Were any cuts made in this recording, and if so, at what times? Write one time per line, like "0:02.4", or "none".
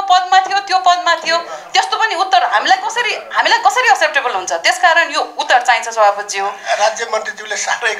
none